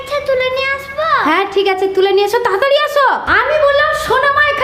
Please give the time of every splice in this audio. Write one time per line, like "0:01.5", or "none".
0:03.3